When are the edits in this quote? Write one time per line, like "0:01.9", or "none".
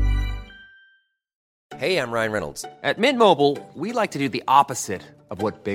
0:01.4